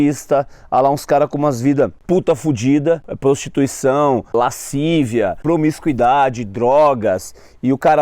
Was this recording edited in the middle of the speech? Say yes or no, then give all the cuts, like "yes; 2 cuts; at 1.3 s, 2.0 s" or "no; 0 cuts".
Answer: yes; 4 cuts; at 2.0 s, 3.1 s, 4.3 s, 5.4 s